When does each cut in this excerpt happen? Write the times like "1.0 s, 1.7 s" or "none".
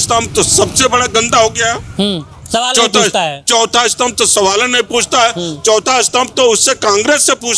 none

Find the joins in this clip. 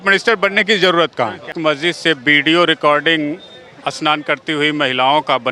1.5 s

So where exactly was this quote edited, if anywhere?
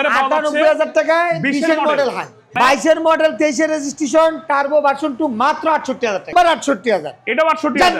2.4 s, 6.3 s

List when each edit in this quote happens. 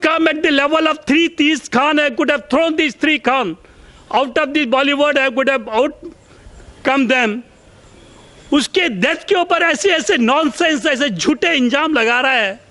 none

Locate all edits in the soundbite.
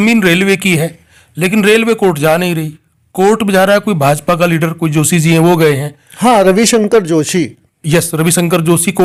none

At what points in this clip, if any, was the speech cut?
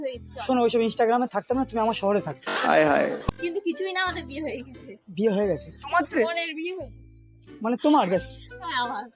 3.2 s

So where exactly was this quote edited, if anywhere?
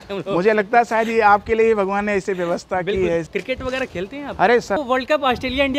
3.3 s, 4.8 s

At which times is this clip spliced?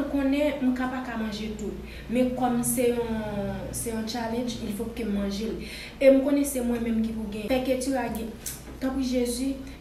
7.4 s

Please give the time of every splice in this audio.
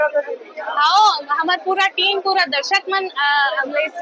none

